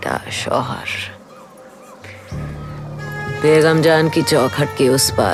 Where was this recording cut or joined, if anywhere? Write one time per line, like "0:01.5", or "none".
none